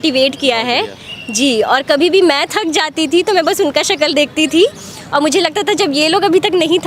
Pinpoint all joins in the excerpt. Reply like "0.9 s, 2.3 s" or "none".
none

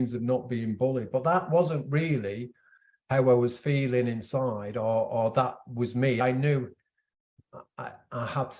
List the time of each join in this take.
6.2 s

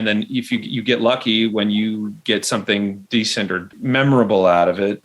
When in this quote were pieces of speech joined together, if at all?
3.6 s

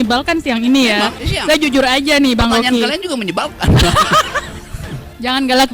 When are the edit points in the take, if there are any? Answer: 1.1 s

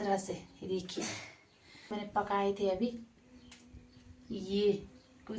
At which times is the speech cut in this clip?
2.0 s

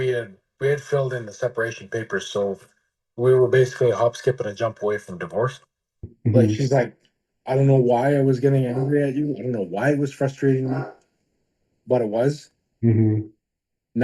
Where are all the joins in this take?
6.1 s

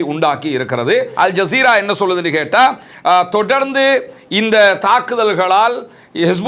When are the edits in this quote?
1.1 s

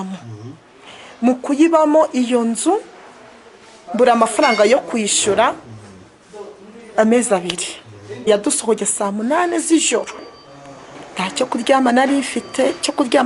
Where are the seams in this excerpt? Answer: 8.3 s

